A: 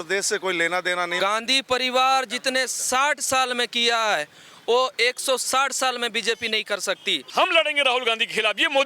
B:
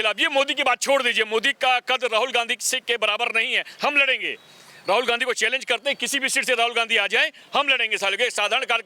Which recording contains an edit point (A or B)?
A